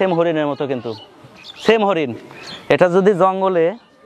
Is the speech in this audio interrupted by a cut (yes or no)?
no